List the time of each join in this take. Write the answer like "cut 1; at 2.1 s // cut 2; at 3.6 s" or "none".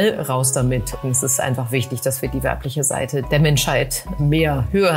cut 1; at 1.0 s // cut 2; at 3.3 s // cut 3; at 4.2 s